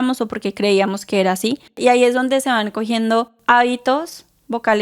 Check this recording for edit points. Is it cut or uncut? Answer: cut